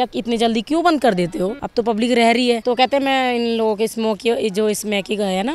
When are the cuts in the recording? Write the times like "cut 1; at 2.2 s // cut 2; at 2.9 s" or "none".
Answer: cut 1; at 1.6 s // cut 2; at 2.6 s